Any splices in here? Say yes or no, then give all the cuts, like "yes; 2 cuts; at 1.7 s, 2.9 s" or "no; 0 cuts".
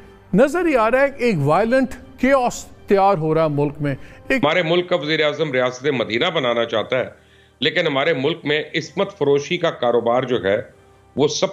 yes; 1 cut; at 4.4 s